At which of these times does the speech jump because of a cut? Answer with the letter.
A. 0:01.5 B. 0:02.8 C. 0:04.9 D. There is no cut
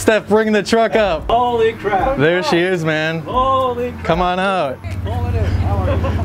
C